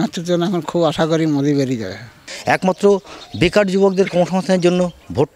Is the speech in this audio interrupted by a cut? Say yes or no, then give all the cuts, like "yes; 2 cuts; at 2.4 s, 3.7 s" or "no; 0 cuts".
yes; 1 cut; at 2.3 s